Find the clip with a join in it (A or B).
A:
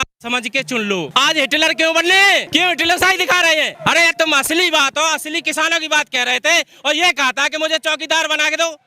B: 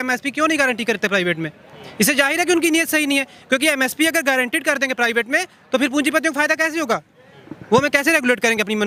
A